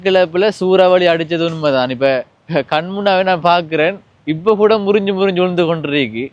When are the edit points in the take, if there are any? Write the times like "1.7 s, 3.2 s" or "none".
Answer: none